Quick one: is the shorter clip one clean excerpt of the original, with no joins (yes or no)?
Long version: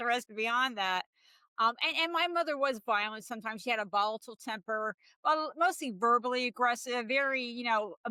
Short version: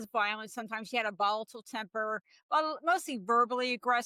yes